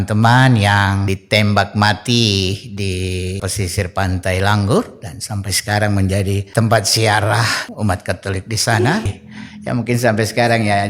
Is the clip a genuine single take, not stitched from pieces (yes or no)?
no